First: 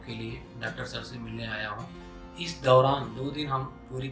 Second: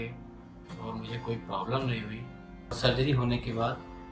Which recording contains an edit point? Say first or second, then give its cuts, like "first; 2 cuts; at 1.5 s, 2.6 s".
second; 1 cut; at 2.8 s